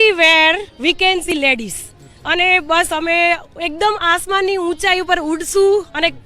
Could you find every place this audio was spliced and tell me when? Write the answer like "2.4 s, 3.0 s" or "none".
1.3 s